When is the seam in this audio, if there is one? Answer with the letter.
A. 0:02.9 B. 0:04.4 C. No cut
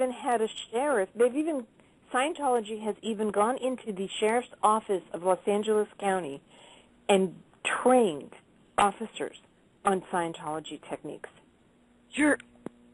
C